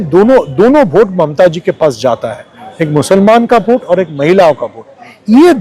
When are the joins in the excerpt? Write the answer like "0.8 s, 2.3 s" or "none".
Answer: none